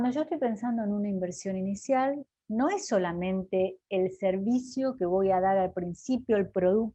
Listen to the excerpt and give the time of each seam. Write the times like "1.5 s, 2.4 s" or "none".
2.3 s